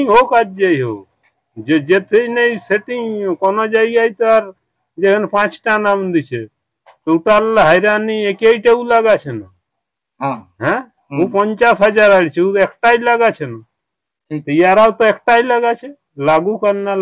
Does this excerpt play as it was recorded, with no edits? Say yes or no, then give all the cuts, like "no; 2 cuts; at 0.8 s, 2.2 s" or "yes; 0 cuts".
yes; 0 cuts